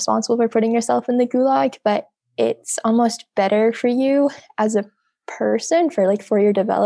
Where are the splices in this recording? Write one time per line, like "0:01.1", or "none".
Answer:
none